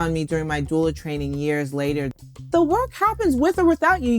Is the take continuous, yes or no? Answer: no